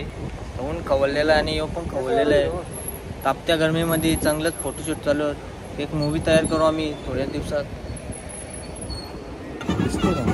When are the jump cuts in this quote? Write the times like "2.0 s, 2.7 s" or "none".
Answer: none